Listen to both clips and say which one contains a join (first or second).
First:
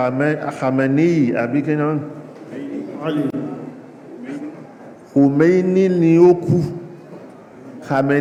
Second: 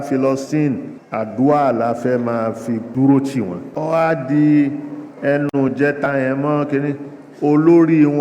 second